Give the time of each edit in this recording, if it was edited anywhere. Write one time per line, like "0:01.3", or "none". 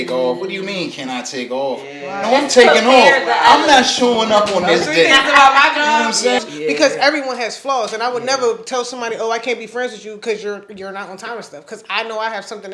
0:06.4